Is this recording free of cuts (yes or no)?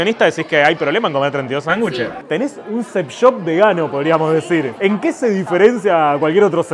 no